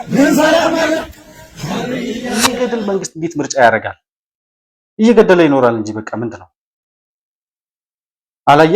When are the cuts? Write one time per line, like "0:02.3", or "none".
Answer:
0:02.6